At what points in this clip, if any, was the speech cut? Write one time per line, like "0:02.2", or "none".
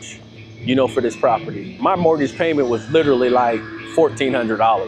0:01.8